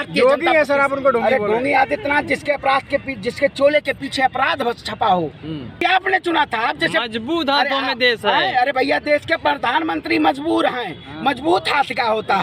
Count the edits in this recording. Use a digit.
1